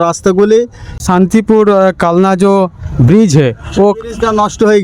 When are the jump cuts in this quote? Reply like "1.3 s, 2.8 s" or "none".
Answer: 1.0 s